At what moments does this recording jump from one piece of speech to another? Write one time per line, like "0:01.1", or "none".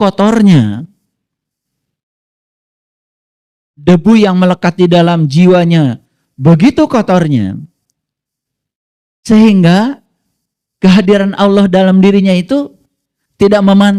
none

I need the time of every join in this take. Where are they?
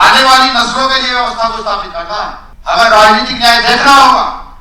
0:02.5

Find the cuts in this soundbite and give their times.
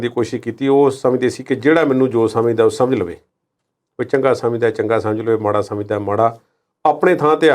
none

